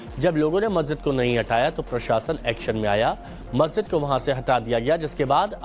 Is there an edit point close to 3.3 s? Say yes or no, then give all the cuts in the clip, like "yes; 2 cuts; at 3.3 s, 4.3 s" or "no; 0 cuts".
yes; 1 cut; at 3.3 s